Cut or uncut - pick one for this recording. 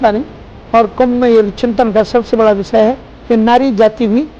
cut